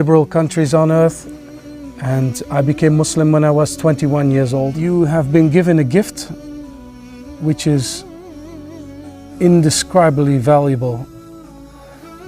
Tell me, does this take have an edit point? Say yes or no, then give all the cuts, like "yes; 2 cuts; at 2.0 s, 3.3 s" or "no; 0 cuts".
yes; 1 cut; at 4.8 s